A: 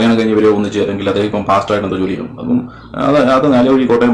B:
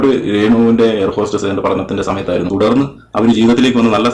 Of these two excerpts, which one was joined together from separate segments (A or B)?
B